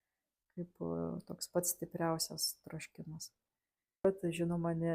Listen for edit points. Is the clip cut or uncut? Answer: cut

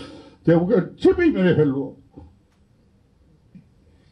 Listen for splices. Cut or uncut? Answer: uncut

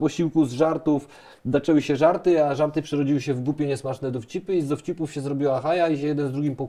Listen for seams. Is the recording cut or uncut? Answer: uncut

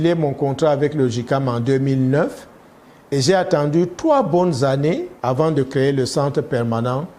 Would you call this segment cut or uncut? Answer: cut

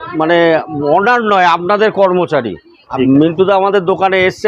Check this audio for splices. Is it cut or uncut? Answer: cut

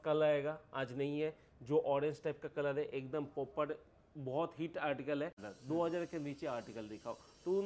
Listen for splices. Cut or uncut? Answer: cut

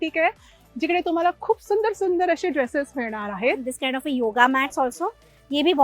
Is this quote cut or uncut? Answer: cut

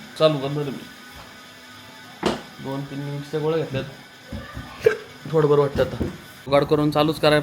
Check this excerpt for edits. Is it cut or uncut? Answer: cut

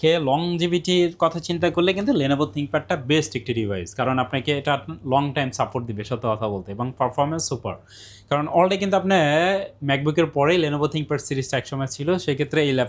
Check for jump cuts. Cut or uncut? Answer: uncut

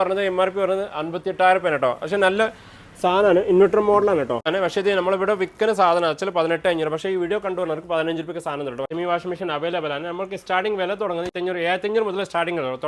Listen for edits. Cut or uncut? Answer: cut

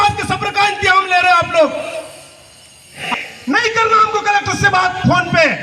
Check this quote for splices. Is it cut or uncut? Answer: cut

